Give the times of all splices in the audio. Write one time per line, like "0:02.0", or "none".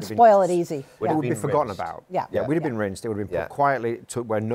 none